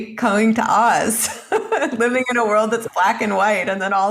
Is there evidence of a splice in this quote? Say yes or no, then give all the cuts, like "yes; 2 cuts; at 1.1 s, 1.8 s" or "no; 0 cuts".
no; 0 cuts